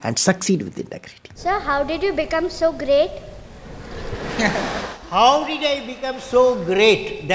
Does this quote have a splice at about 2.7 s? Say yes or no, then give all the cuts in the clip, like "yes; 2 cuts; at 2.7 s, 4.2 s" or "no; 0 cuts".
no; 1 cut; at 1.4 s